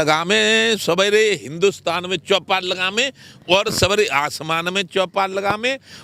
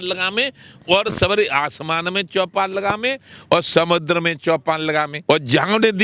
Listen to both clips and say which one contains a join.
second; 1 cut; at 5.1 s

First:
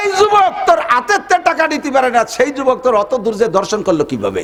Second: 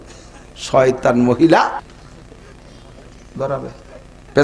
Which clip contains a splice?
second; 1 cut; at 1.8 s

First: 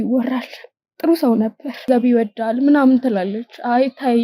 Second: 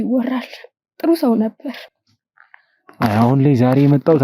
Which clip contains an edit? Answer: first; 1 cut; at 1.9 s

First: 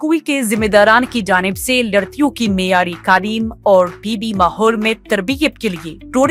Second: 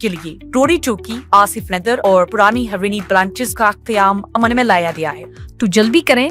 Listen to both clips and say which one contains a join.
second; 1 cut; at 5.2 s

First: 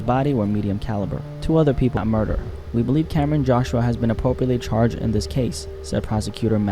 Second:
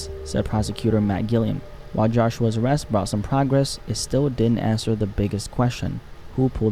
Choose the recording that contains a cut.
first; 1 cut; at 2.0 s

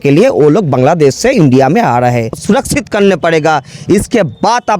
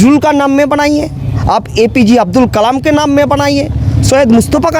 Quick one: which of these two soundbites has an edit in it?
first; 1 cut; at 2.3 s

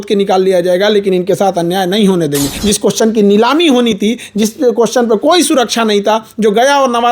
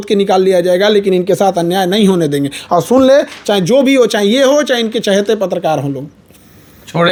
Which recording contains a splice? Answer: first; 1 cut; at 2.5 s

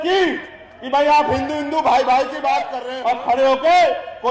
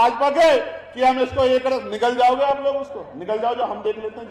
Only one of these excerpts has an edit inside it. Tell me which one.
first; 1 cut; at 2.8 s

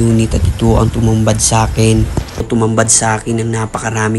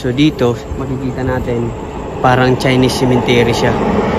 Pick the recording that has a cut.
first; 1 cut; at 2.5 s

